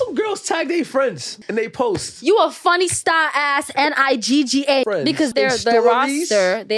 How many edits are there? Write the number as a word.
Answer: two